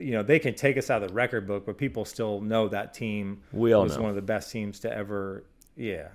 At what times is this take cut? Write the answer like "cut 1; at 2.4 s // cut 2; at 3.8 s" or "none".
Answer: none